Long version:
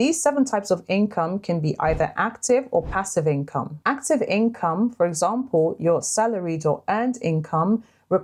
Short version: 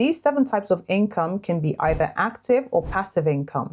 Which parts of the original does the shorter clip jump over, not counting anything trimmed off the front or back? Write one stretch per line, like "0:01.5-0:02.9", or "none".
none